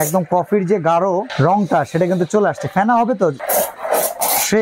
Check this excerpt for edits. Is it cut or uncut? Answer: cut